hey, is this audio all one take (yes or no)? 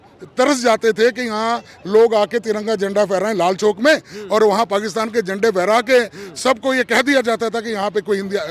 yes